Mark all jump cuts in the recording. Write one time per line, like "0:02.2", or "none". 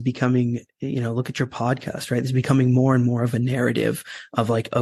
none